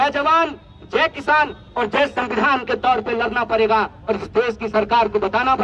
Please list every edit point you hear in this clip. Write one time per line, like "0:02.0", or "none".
none